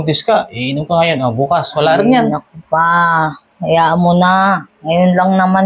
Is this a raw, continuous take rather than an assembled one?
yes; 0 cuts

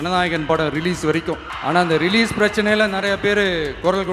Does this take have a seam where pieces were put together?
yes; 1 cut; at 1.5 s

